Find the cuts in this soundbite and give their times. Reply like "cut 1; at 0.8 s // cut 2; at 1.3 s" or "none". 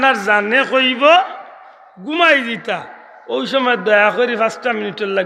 none